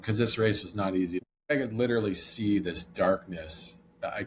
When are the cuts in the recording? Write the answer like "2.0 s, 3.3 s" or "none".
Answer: 1.3 s